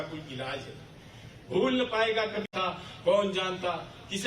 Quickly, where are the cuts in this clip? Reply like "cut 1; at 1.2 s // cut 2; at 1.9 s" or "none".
cut 1; at 2.5 s